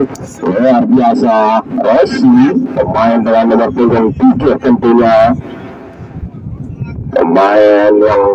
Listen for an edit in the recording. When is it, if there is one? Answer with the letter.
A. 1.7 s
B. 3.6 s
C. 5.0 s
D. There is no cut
A